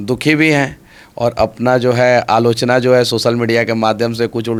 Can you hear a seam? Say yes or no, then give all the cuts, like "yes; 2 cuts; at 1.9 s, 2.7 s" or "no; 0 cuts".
no; 0 cuts